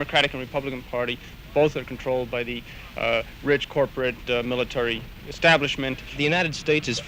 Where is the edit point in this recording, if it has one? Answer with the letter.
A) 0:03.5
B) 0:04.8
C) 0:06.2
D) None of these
C